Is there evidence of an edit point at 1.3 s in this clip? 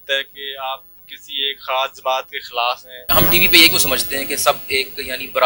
no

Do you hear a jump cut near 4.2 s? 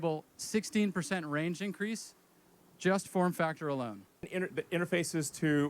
yes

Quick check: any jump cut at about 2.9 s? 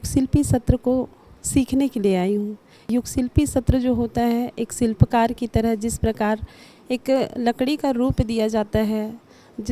yes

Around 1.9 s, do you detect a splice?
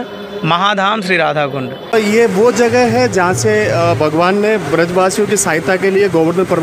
yes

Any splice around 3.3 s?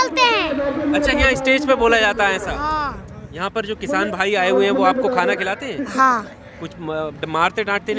yes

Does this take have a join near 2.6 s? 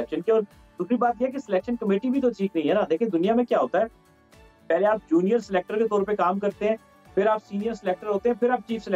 no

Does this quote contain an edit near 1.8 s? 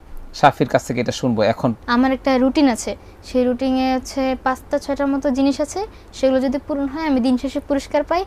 yes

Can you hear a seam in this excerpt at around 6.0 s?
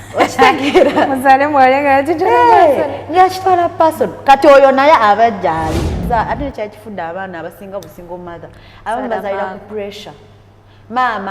yes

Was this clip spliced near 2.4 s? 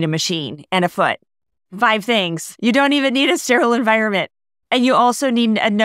yes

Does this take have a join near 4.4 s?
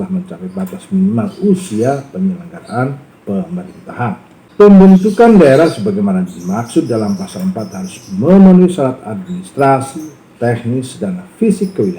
yes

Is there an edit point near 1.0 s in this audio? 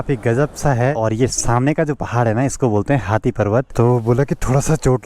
yes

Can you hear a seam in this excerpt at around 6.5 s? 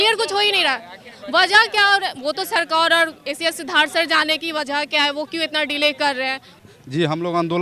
yes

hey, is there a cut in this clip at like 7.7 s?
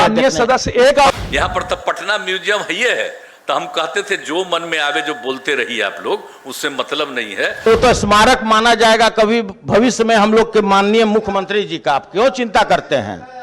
yes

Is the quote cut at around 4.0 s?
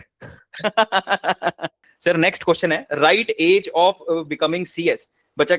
no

